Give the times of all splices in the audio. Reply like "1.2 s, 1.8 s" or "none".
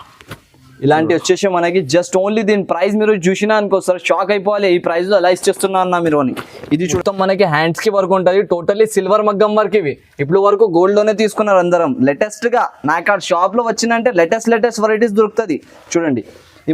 6.9 s